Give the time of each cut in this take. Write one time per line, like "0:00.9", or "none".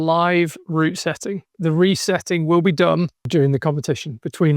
0:01.5
0:03.3